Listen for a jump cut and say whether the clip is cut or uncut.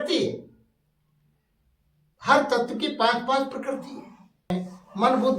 cut